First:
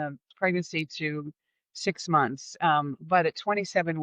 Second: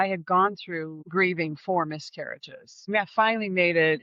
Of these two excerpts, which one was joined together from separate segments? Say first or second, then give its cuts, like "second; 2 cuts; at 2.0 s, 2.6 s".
second; 2 cuts; at 1.0 s, 2.8 s